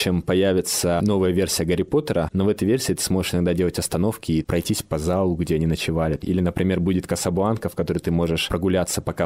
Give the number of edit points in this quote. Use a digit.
3